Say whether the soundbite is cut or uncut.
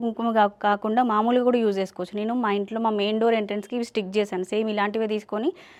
uncut